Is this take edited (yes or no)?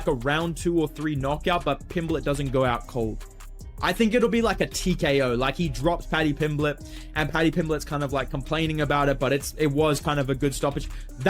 yes